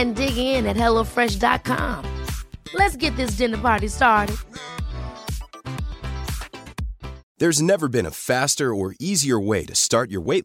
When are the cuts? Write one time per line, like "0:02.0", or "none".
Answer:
0:07.2